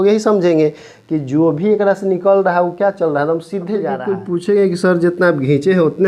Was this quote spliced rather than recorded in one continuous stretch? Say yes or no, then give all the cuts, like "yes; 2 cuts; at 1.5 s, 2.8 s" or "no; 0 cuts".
yes; 1 cut; at 4.0 s